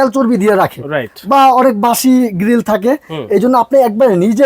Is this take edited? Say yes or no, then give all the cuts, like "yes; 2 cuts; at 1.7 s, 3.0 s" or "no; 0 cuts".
no; 0 cuts